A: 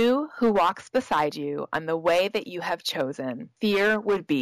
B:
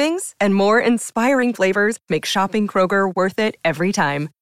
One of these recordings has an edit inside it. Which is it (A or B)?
A